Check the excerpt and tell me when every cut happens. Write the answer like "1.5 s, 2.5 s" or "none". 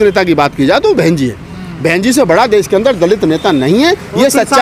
none

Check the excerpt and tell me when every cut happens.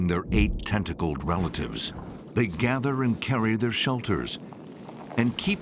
2.1 s

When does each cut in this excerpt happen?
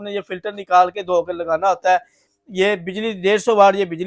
none

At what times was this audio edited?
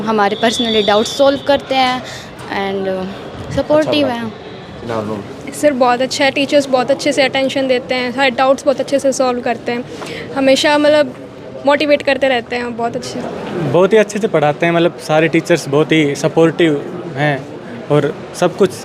4.8 s, 13.2 s

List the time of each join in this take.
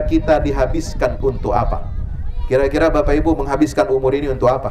none

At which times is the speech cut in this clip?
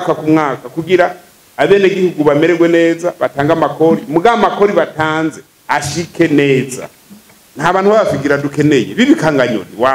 7.3 s

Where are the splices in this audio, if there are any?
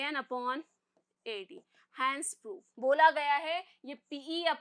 2.6 s

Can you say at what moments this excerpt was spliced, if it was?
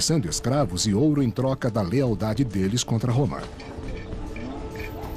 none

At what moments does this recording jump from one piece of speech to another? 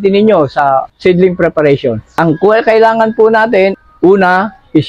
0.9 s, 2.1 s, 3.8 s

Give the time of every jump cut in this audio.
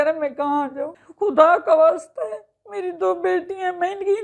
1.0 s

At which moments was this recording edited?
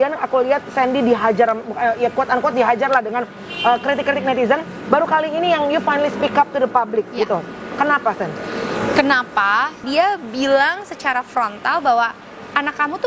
9.8 s

